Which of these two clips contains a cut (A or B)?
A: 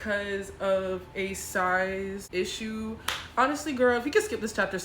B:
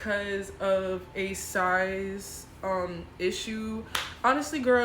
A